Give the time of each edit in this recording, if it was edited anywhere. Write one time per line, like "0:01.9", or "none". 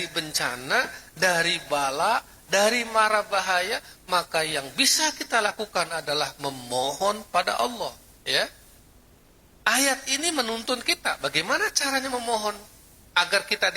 0:08.1

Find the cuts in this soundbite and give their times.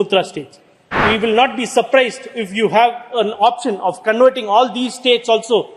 0:00.9

